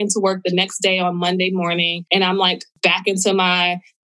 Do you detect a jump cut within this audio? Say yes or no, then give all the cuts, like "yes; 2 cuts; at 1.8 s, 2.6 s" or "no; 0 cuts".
yes; 2 cuts; at 2.0 s, 2.7 s